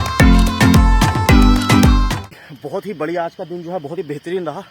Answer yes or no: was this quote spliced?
yes